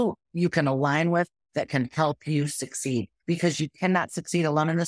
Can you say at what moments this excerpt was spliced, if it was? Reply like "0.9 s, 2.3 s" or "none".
3.1 s